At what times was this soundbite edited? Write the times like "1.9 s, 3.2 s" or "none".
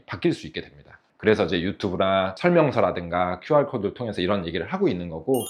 none